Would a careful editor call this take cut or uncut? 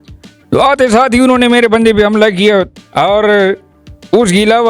cut